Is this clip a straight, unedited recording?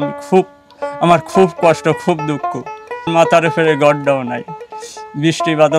no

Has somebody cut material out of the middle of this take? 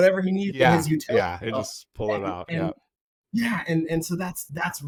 no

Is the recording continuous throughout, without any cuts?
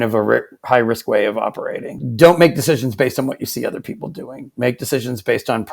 no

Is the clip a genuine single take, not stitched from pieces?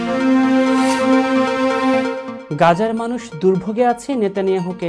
no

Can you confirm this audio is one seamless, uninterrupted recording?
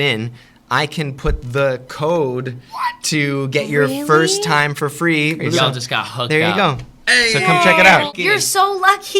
no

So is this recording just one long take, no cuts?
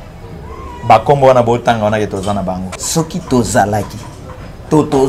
no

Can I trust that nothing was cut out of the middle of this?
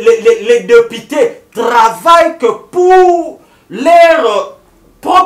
yes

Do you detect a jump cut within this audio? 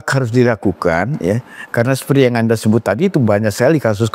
no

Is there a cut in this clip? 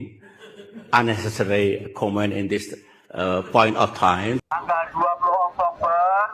yes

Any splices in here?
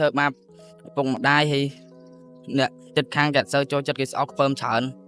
no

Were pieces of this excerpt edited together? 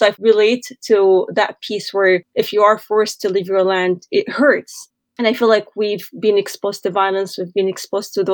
no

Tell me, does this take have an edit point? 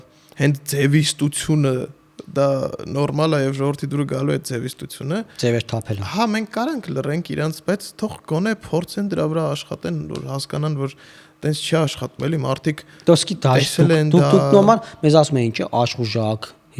no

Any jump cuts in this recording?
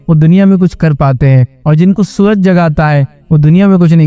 no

